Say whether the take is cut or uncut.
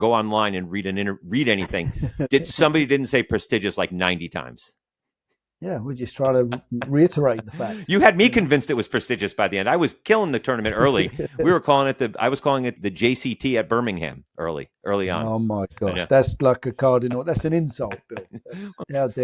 uncut